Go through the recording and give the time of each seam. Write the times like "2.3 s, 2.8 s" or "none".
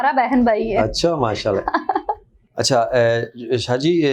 2.4 s